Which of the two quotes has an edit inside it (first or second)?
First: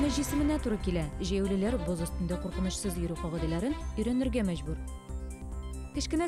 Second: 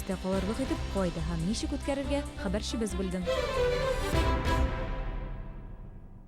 second